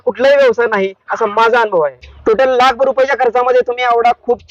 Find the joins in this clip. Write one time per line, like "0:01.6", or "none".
0:02.1